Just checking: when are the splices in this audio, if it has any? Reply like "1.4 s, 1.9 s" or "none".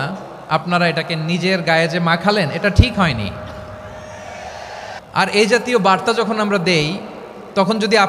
5.0 s